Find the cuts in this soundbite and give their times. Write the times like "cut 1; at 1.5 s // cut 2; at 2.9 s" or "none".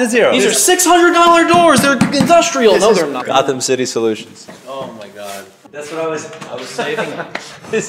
cut 1; at 3.1 s // cut 2; at 5.6 s